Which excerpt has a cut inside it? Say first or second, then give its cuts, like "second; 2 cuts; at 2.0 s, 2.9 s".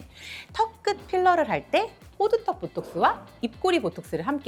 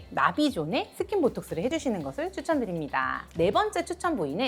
second; 2 cuts; at 1.7 s, 3.2 s